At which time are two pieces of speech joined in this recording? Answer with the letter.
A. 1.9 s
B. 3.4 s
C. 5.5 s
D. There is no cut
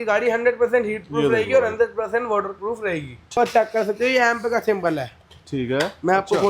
B